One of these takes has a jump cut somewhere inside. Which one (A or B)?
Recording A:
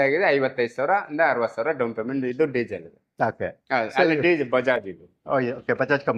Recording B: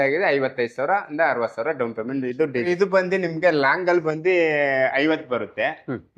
B